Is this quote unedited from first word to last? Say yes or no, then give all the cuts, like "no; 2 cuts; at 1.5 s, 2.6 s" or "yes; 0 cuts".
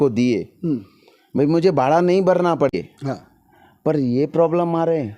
no; 1 cut; at 2.7 s